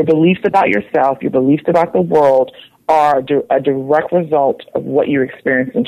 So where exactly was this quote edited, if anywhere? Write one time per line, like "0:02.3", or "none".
none